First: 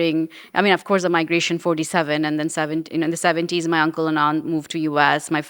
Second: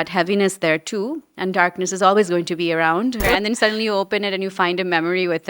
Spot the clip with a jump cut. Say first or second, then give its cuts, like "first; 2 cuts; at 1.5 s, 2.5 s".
second; 1 cut; at 3.2 s